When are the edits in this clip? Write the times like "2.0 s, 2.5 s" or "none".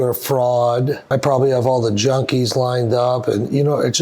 1.0 s